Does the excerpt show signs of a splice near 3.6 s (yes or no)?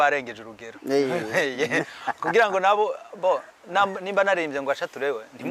no